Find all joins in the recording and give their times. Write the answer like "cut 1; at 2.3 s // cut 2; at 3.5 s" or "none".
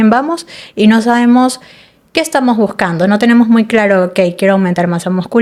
none

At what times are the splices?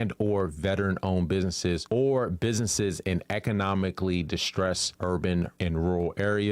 cut 1; at 4.9 s // cut 2; at 5.5 s

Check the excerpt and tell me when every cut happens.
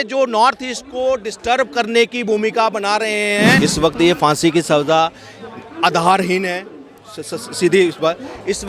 cut 1; at 3.6 s

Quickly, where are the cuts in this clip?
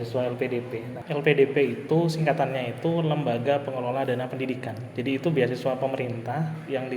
cut 1; at 0.9 s

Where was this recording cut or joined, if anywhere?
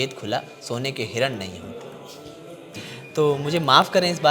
cut 1; at 2.7 s

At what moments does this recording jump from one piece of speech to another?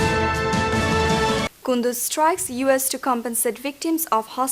cut 1; at 1.0 s

